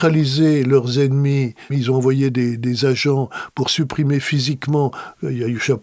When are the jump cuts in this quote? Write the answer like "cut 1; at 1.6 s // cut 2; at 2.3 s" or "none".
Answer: cut 1; at 1.8 s